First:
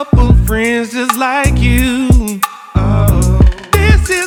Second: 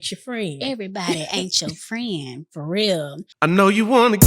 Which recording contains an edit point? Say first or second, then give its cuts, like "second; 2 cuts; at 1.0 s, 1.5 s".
second; 1 cut; at 3.2 s